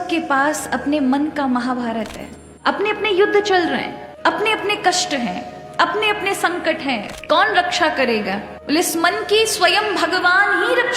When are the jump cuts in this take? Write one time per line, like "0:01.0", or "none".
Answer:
0:02.5
0:07.1